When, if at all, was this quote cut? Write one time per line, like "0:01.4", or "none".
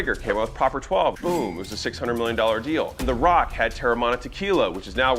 0:01.2
0:03.0